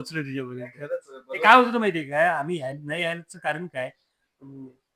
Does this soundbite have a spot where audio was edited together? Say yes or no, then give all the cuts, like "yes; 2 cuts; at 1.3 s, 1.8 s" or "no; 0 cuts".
no; 0 cuts